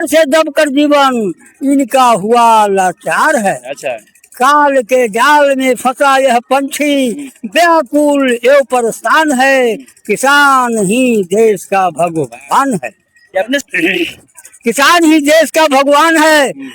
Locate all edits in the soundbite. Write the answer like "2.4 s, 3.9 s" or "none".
13.6 s